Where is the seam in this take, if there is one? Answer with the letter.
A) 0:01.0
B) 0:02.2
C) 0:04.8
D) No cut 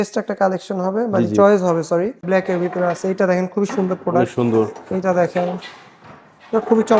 B